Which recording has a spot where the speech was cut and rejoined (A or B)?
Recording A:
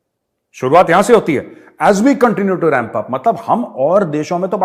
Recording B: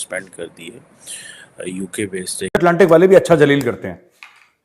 B